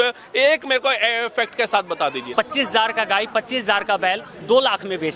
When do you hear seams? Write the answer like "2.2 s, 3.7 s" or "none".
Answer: 2.3 s